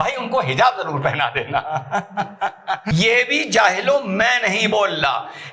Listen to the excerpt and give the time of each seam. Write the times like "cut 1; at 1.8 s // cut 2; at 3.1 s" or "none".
cut 1; at 2.5 s